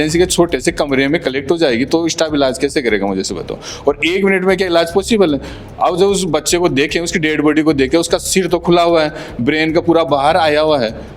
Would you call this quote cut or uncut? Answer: uncut